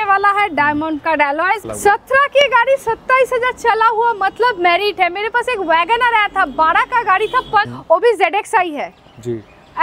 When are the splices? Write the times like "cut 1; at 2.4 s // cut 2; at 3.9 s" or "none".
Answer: cut 1; at 1.6 s // cut 2; at 7.7 s